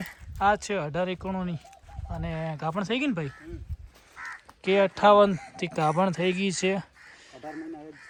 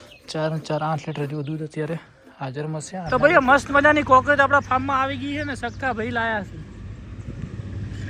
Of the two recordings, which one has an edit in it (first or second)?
second